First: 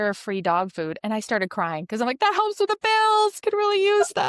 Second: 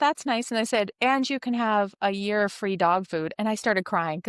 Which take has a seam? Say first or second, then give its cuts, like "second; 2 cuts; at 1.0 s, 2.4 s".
first; 1 cut; at 3.4 s